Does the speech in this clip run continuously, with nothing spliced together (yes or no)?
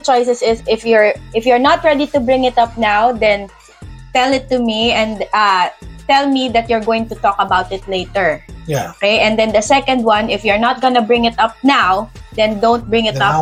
yes